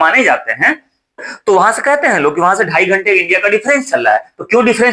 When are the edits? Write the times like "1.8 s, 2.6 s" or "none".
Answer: 1.3 s